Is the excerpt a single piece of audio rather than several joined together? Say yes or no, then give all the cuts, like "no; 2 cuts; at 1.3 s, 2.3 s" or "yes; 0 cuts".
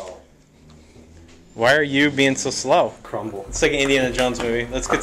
no; 1 cut; at 3.1 s